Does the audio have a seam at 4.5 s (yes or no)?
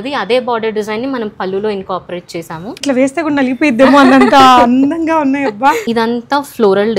no